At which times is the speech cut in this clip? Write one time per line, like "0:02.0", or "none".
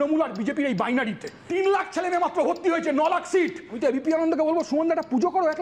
0:01.4
0:03.7